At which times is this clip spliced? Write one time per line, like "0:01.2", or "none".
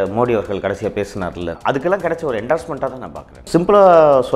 0:01.6
0:03.4